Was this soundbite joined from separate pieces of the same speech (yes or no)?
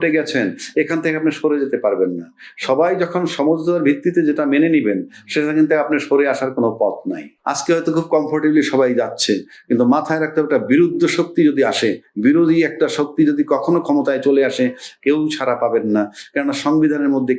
yes